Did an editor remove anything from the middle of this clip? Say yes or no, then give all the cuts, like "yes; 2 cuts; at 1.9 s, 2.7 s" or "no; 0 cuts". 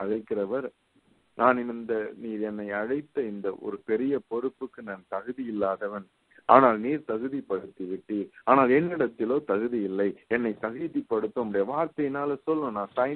no; 0 cuts